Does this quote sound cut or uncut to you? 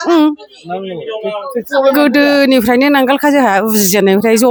uncut